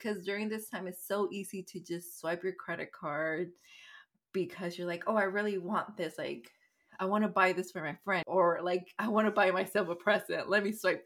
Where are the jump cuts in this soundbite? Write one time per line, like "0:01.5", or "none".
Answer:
0:08.2